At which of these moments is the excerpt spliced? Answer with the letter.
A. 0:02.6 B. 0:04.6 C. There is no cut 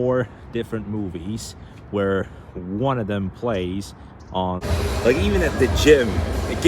B